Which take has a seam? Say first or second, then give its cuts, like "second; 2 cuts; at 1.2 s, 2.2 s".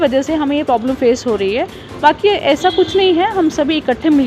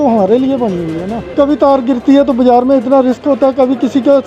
second; 1 cut; at 1.3 s